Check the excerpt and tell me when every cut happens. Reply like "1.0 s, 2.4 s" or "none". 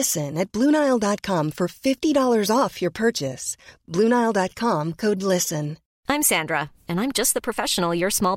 5.8 s